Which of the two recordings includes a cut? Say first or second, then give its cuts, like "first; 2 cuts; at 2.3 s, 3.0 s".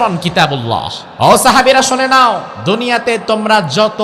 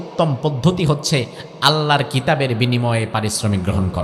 first; 2 cuts; at 1.0 s, 2.5 s